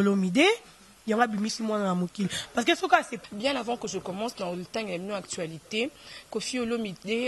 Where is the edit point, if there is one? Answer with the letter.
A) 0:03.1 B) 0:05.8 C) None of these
A